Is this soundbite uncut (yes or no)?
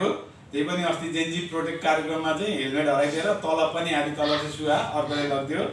yes